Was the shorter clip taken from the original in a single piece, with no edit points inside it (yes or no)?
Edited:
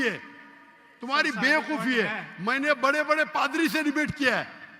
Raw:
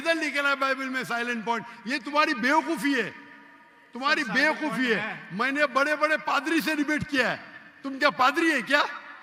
yes